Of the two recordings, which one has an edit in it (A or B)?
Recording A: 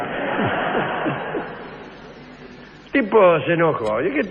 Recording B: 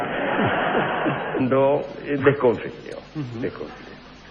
A